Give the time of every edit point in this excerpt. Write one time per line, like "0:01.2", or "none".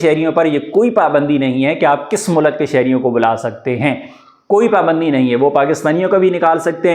none